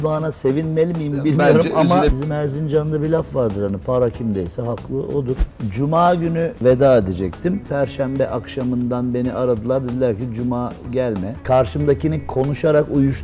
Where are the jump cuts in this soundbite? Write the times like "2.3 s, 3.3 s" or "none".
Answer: 2.1 s, 5.4 s, 6.6 s, 11.4 s